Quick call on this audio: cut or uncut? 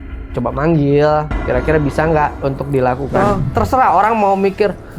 cut